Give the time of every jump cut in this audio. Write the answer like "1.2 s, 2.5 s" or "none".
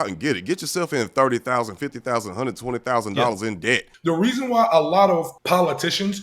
3.9 s, 5.4 s